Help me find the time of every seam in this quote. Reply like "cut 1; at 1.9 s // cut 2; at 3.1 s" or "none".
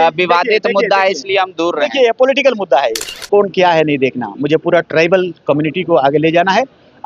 cut 1; at 3.1 s